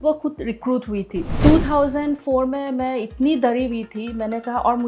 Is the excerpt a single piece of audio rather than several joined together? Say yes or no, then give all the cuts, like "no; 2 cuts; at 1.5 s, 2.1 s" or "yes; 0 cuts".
no; 1 cut; at 1.3 s